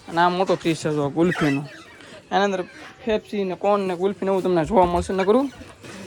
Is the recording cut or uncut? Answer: uncut